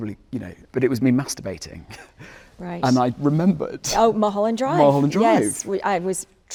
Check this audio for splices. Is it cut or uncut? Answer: uncut